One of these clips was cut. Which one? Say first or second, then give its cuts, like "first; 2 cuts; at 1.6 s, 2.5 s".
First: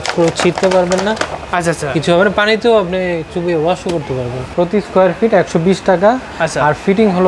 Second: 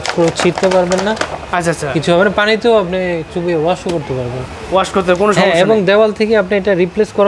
first; 1 cut; at 4.5 s